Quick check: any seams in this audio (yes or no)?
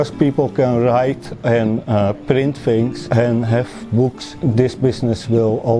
yes